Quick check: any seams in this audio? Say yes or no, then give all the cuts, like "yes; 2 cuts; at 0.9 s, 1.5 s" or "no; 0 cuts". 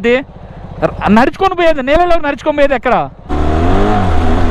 yes; 1 cut; at 3.3 s